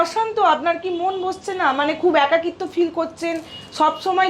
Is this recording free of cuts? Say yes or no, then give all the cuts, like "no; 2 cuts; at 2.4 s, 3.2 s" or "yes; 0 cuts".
yes; 0 cuts